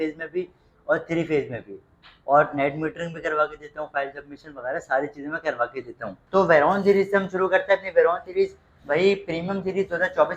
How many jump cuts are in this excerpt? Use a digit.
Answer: 1